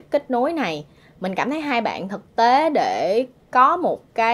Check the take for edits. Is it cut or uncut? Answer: uncut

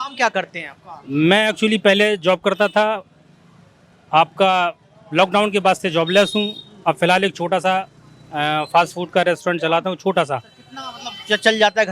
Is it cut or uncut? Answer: uncut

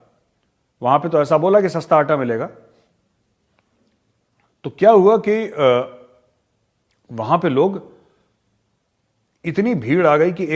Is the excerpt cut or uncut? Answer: uncut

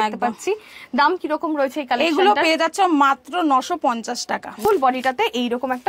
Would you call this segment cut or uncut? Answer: cut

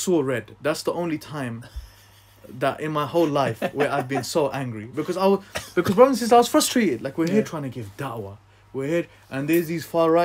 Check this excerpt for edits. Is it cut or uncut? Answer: uncut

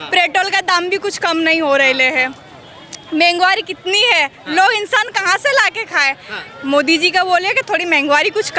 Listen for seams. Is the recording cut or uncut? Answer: uncut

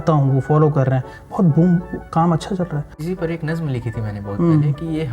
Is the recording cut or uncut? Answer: cut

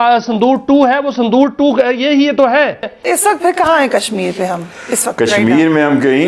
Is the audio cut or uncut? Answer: cut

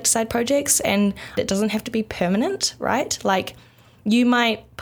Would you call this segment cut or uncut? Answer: cut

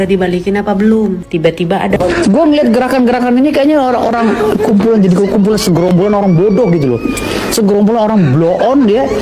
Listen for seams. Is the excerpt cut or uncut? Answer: cut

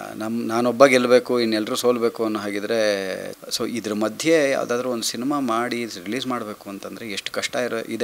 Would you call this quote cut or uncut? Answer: cut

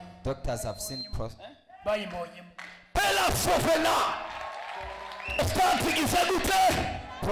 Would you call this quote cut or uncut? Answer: cut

